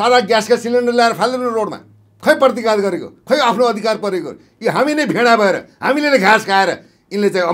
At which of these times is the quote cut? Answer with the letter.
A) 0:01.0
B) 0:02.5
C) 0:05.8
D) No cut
D